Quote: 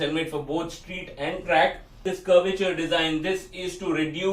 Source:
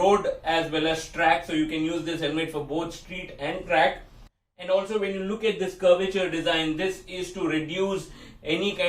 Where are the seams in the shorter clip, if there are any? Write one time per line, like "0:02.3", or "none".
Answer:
0:02.0